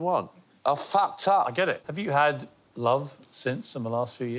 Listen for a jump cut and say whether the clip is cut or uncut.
cut